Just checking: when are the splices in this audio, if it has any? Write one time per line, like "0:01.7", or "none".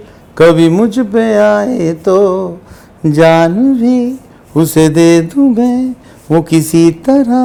none